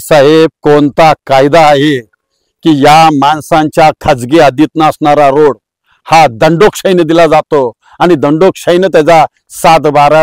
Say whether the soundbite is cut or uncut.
uncut